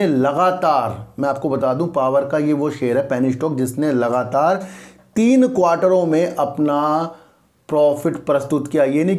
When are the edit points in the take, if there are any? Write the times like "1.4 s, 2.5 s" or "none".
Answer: none